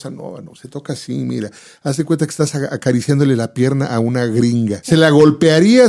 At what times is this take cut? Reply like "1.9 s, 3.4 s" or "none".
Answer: 4.8 s

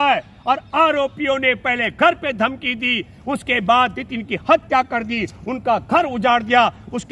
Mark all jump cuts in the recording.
none

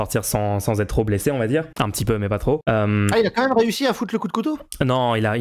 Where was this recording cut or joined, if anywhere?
1.7 s, 2.6 s

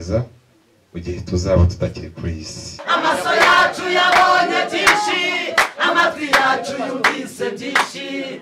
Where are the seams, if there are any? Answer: 2.8 s

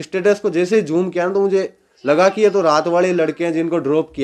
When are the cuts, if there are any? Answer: none

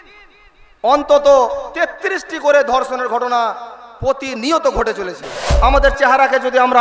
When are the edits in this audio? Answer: 5.5 s

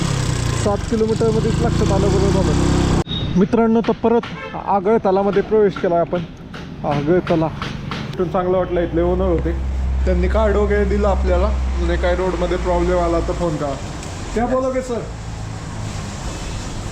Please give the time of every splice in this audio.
3.0 s, 8.2 s

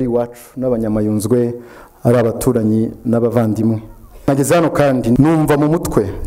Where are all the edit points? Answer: 4.3 s, 5.2 s

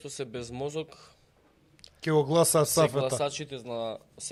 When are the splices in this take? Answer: none

